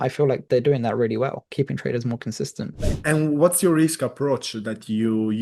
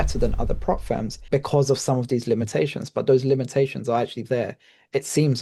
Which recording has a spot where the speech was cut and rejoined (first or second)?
first